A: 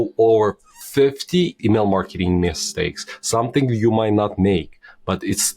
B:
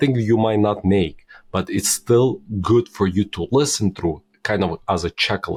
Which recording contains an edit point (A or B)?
A